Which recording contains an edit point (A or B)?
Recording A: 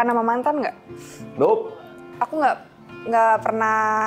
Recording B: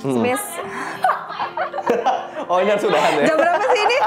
A